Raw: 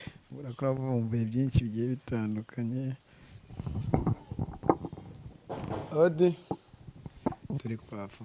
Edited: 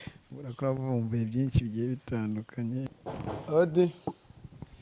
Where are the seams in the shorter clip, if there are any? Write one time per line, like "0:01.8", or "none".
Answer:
0:03.0